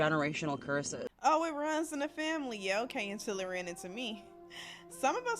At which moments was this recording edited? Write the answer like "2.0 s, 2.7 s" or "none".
1.0 s